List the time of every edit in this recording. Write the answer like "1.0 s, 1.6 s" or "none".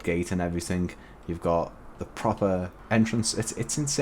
2.8 s